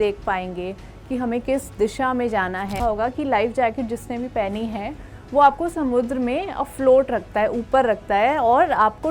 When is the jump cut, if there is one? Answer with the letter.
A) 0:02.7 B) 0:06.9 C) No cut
A